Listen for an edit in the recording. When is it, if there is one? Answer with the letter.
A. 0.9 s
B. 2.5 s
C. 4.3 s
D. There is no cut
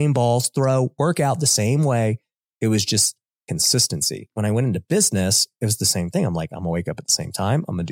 C